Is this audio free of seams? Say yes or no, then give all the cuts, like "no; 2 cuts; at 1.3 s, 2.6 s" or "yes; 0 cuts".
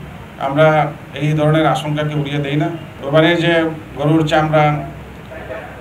no; 1 cut; at 2.9 s